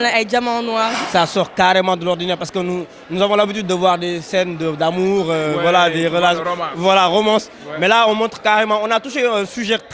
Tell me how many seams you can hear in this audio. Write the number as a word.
one